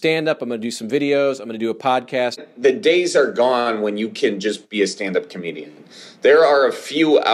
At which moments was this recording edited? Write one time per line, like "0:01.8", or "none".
0:02.5